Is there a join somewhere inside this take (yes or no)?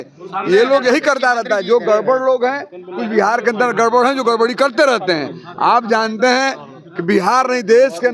no